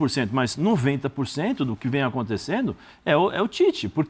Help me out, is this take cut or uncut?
uncut